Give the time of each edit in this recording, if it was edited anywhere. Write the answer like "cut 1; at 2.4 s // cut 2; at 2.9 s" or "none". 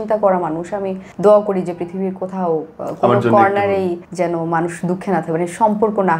cut 1; at 1.0 s // cut 2; at 4.0 s

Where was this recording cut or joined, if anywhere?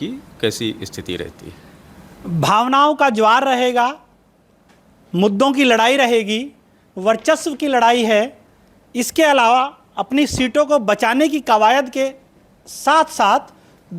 none

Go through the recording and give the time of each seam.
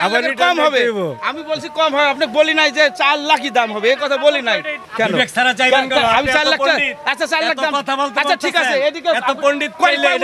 cut 1; at 4.8 s

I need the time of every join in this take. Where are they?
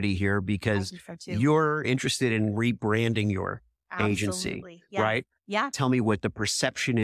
cut 1; at 1.8 s // cut 2; at 5.7 s

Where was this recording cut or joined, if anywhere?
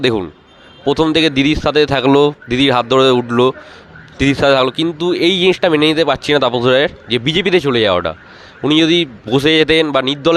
none

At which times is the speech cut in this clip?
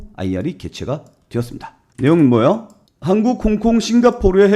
cut 1; at 2.8 s

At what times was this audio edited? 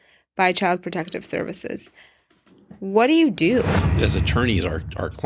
cut 1; at 3.8 s

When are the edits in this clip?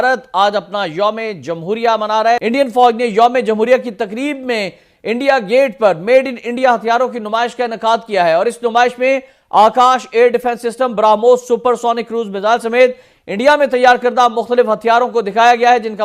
cut 1; at 2.4 s

